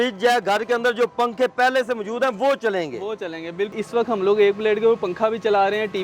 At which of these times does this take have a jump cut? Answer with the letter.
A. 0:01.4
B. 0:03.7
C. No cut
B